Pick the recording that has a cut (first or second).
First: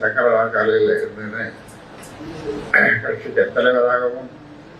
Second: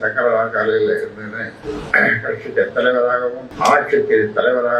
second